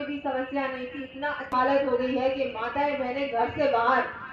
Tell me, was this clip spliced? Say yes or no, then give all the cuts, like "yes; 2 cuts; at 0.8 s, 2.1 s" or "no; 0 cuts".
yes; 1 cut; at 1.5 s